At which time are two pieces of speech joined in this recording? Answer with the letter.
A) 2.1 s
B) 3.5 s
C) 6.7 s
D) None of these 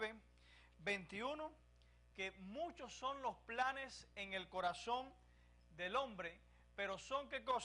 A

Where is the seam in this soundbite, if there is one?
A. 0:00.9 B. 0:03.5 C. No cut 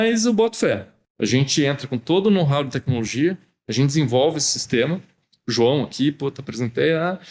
A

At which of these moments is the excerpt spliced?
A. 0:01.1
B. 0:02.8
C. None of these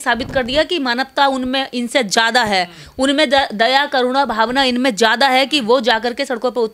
C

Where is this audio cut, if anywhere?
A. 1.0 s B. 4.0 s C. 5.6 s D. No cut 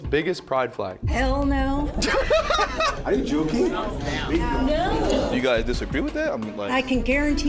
B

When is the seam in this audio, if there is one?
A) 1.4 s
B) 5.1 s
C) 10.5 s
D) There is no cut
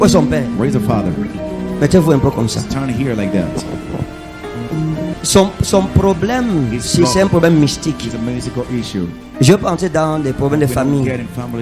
B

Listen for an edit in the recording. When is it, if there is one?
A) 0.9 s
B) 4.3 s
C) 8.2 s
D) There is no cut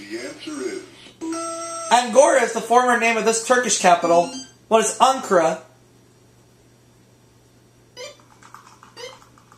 A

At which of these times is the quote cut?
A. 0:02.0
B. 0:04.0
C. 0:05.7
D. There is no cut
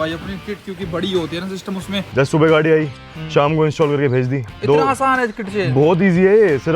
A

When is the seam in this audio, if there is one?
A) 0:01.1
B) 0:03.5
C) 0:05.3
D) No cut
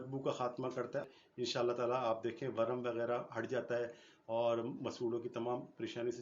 A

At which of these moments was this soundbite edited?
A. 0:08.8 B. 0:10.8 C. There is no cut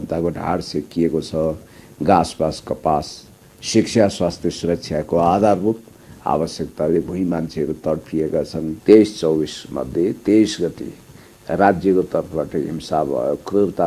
A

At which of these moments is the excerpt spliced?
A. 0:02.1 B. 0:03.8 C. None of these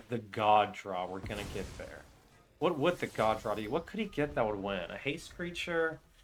C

